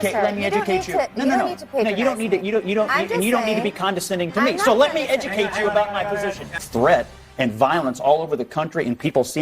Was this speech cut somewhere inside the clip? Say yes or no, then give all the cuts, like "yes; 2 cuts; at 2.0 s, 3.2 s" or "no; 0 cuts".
yes; 1 cut; at 6.6 s